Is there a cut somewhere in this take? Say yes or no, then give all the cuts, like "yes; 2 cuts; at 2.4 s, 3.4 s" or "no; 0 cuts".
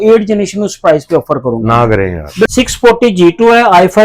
yes; 1 cut; at 2.5 s